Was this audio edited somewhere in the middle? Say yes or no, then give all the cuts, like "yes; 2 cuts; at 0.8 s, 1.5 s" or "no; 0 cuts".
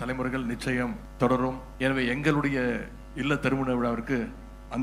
yes; 2 cuts; at 1.0 s, 1.7 s